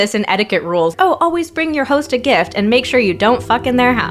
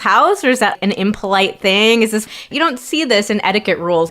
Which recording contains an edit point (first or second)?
second